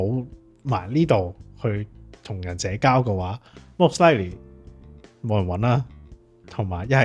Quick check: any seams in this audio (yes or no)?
no